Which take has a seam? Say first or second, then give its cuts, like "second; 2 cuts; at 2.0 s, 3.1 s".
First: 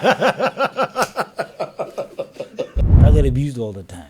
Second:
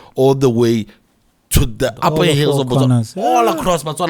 first; 1 cut; at 2.8 s